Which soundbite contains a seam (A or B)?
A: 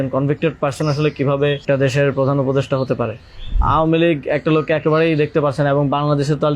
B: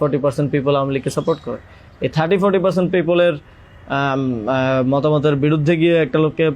A